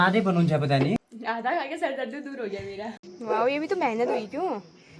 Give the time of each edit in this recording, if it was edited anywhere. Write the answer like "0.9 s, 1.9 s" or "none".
1.0 s, 3.1 s